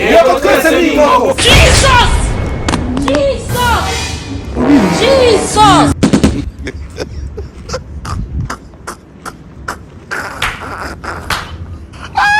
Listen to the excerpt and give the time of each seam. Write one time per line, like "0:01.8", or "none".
none